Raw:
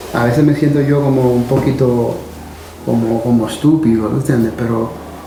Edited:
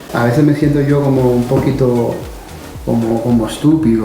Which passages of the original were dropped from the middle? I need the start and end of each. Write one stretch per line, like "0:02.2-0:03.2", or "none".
none